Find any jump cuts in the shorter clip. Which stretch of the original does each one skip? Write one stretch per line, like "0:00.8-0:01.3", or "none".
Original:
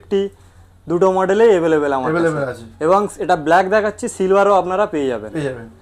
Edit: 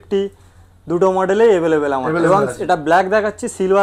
0:02.2-0:02.9